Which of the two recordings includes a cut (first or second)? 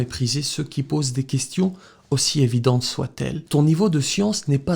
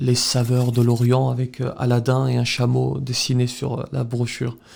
first